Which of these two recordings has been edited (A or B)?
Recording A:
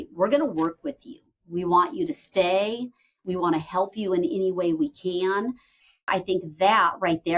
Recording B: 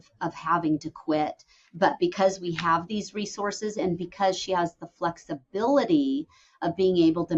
A